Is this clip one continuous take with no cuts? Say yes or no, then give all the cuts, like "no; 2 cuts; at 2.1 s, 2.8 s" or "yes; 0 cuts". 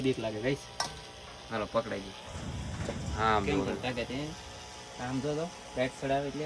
yes; 0 cuts